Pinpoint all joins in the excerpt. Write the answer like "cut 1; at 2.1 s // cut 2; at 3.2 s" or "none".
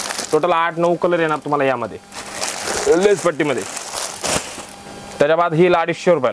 none